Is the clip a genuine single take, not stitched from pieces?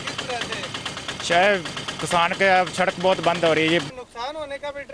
no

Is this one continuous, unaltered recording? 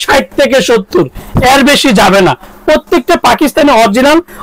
yes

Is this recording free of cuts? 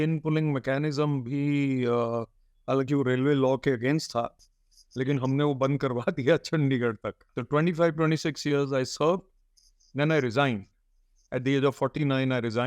no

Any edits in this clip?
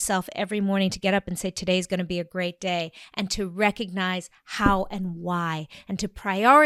no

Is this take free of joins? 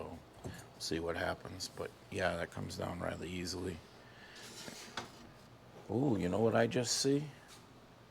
no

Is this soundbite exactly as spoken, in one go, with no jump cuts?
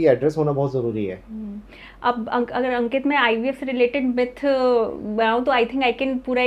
yes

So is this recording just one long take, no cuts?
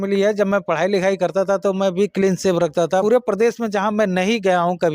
no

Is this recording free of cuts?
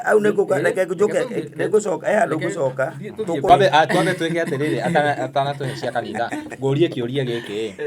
no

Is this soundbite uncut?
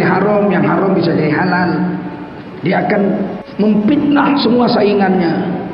no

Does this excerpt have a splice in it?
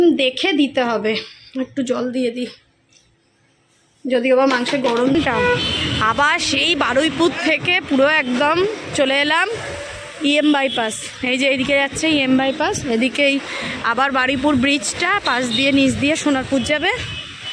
yes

